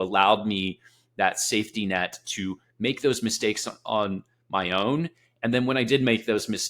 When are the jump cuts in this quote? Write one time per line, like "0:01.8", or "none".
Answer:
none